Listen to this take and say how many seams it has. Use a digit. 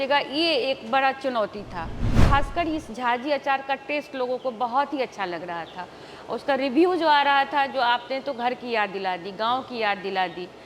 1